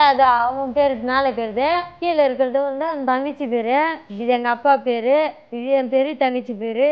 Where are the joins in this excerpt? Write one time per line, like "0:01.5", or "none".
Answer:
0:01.9
0:04.1